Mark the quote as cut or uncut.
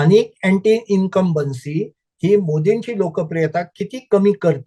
uncut